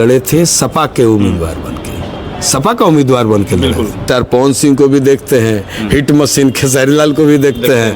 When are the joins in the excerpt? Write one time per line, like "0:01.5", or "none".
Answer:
0:04.0